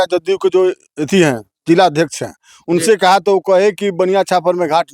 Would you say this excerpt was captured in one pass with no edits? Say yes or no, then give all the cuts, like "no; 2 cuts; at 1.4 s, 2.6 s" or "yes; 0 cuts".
yes; 0 cuts